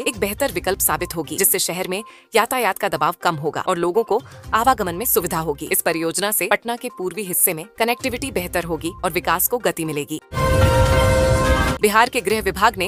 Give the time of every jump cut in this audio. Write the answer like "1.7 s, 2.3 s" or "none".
none

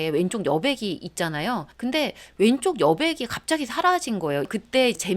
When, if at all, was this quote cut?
2.1 s, 4.4 s

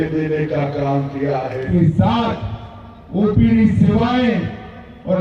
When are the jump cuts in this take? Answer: 1.7 s

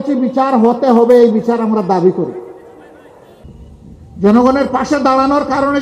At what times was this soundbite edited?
3.4 s

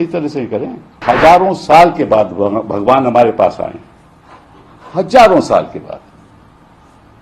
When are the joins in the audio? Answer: 1.0 s

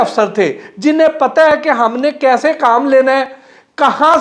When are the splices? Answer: none

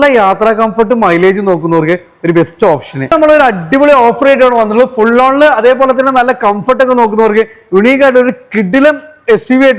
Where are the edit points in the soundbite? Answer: 3.0 s

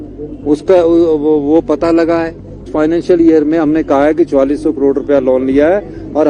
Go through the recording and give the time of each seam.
2.7 s

